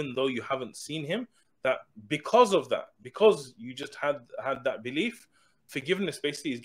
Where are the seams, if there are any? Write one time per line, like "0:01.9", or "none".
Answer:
0:05.7